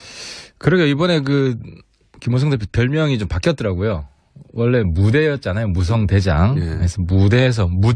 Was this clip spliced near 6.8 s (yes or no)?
no